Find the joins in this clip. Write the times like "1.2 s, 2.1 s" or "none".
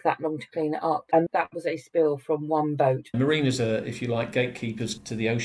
3.1 s

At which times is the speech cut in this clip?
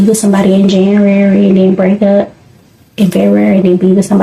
none

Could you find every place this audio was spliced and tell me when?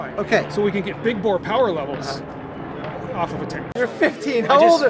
3.7 s

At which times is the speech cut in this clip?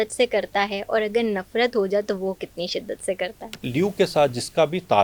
3.6 s

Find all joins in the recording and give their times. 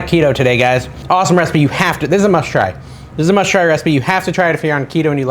0.9 s

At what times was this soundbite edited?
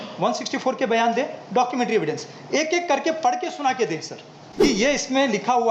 4.6 s

